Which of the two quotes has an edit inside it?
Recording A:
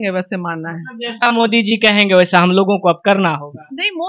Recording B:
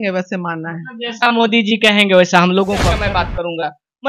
B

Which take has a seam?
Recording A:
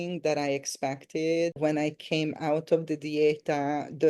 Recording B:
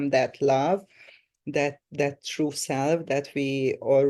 A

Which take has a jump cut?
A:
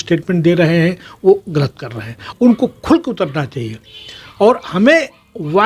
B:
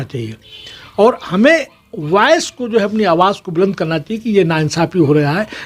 A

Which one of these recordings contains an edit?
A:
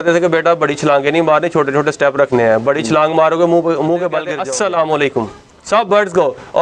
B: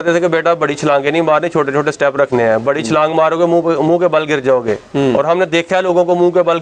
A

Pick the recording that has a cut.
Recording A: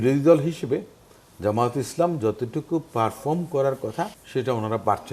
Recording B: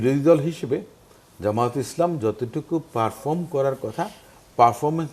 A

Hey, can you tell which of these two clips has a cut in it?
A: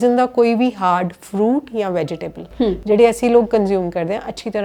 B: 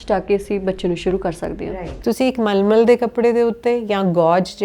B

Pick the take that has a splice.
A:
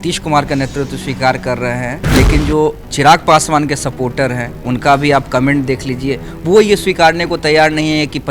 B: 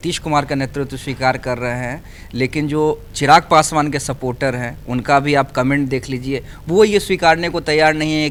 A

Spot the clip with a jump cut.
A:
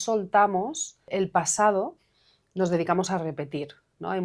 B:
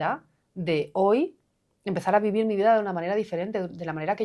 A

